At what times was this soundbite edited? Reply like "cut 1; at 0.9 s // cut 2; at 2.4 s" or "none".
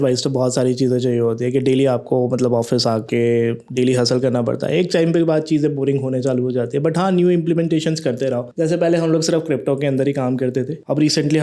none